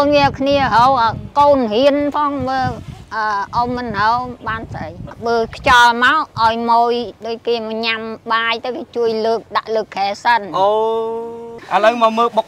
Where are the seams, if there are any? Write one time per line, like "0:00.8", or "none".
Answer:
0:05.1
0:11.5